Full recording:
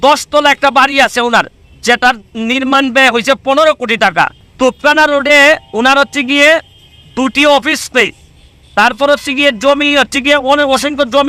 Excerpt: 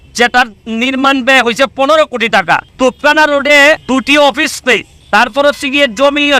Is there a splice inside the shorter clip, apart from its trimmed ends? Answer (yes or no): yes